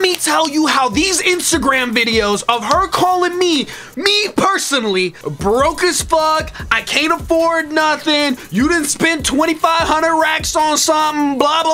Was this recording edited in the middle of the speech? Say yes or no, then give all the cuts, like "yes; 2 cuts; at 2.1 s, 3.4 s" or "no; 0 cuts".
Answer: yes; 1 cut; at 5.2 s